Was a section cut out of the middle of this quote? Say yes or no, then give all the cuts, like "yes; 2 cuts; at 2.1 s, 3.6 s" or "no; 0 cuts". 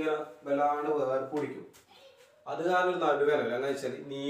no; 0 cuts